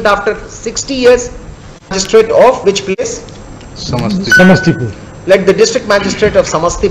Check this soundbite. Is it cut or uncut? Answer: cut